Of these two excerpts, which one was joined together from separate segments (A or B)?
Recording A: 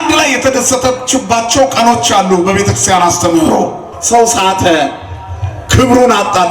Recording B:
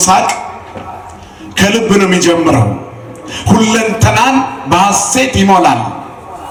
A